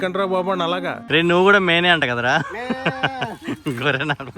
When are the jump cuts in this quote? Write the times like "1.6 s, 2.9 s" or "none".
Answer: 1.0 s

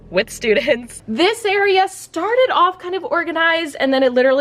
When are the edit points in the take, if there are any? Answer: 0.9 s

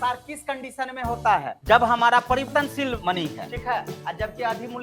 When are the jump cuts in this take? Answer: 3.2 s

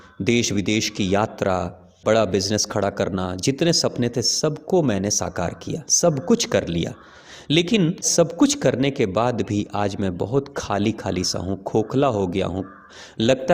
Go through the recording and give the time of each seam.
8.1 s

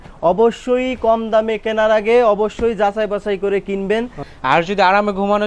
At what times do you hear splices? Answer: 4.2 s

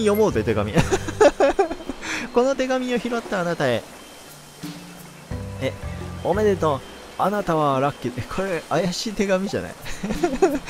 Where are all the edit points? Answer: none

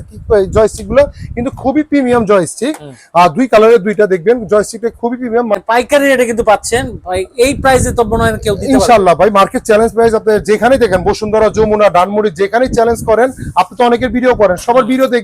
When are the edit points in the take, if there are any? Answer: 5.6 s

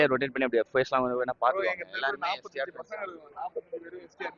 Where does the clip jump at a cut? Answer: none

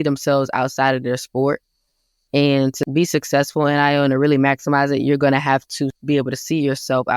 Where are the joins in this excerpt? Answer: 2.8 s, 6.0 s

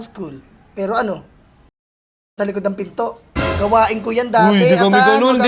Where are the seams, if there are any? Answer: none

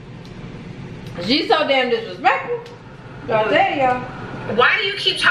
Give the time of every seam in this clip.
none

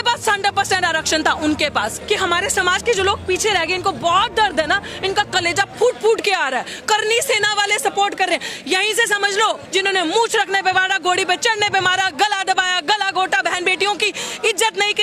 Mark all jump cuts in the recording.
2.0 s, 9.6 s

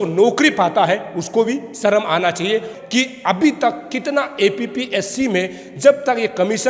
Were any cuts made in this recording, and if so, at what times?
2.7 s

